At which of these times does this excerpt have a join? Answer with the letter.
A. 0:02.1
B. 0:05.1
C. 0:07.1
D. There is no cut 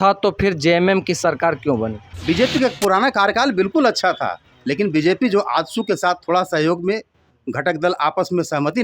A